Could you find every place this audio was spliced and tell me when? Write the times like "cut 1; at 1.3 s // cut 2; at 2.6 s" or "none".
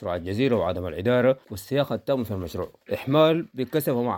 cut 1; at 1.5 s // cut 2; at 2.7 s